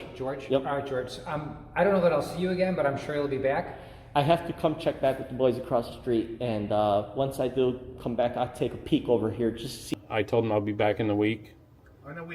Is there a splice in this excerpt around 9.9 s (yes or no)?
yes